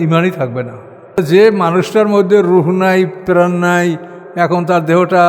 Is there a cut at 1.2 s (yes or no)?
yes